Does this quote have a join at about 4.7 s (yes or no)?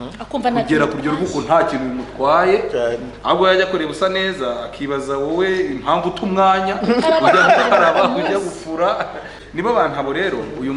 no